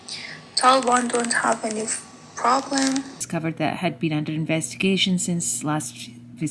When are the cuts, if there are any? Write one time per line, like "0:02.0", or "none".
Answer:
0:03.2

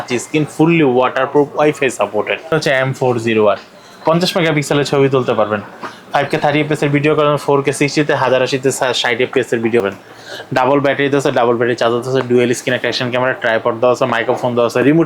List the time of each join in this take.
0:02.5
0:09.8

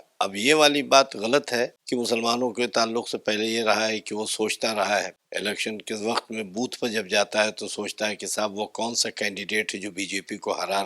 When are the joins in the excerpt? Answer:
0:01.8
0:05.2

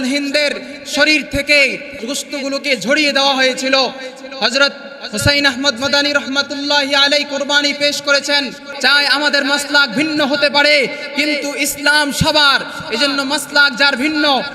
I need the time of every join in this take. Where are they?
0:02.0
0:08.7

